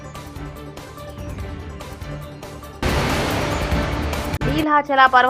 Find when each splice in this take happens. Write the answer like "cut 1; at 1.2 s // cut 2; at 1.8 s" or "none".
cut 1; at 2.8 s // cut 2; at 4.3 s